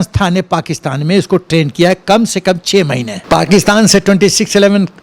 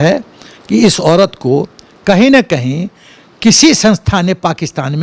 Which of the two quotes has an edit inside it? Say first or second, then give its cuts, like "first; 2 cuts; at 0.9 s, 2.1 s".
first; 1 cut; at 3.1 s